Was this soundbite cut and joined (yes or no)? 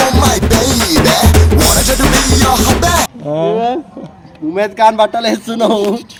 no